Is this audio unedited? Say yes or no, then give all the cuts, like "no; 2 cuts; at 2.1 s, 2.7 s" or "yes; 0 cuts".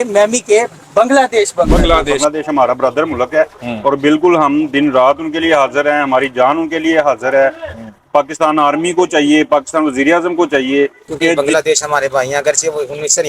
no; 2 cuts; at 2.2 s, 11.3 s